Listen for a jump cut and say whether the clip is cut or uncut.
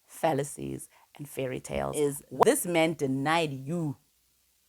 cut